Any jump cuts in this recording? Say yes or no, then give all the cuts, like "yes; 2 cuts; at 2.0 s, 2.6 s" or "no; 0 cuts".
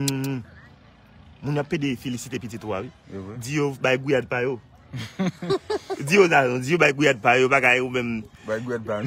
no; 0 cuts